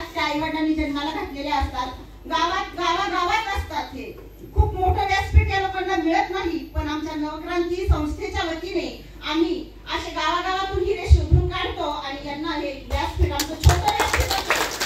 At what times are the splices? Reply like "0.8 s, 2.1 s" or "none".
none